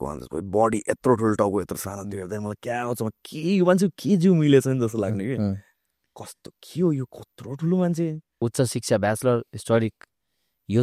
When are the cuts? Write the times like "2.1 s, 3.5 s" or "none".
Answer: 8.4 s

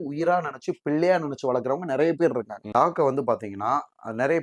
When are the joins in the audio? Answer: 2.6 s

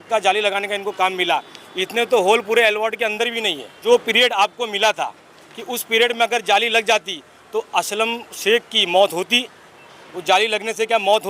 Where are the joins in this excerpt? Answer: 3.8 s

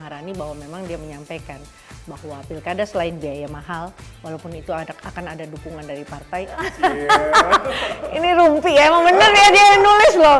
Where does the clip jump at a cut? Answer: 6.5 s

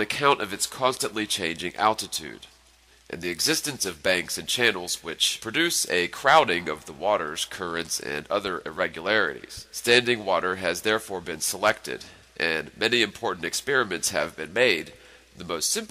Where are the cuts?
13.4 s

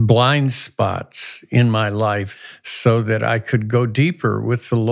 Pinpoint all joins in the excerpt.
2.4 s

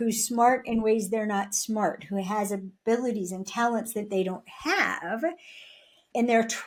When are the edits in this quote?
none

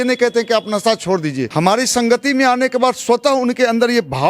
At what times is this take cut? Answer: 1.5 s

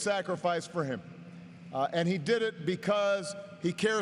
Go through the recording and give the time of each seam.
1.8 s

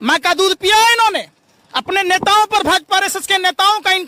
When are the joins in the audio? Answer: none

